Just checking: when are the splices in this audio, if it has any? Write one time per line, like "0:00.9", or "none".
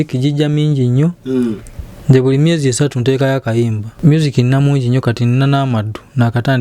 0:03.9